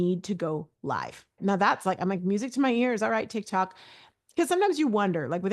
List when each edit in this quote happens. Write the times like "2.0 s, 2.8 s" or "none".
none

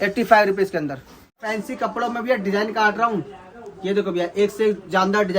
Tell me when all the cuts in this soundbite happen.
1.5 s

